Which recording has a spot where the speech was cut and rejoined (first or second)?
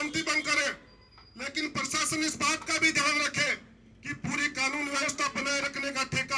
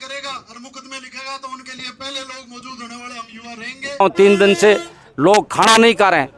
second